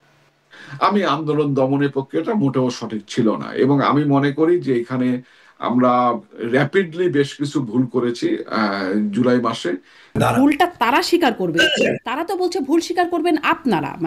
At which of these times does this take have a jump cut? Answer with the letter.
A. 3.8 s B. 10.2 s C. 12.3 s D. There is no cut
B